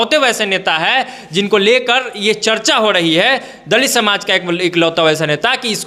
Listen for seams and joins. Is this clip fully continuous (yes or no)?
yes